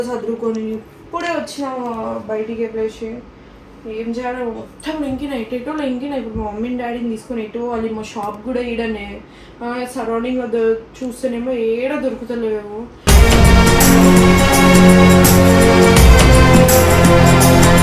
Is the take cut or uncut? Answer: uncut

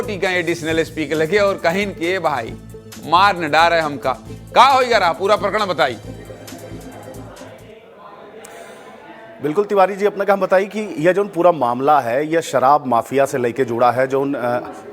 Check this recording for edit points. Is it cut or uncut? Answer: uncut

